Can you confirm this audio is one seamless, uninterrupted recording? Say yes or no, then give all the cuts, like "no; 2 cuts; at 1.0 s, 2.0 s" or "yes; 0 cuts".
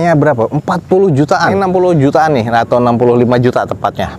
no; 1 cut; at 1.5 s